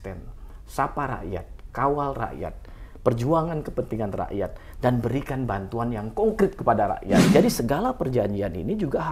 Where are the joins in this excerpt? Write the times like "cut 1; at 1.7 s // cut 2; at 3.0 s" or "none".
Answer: cut 1; at 7.3 s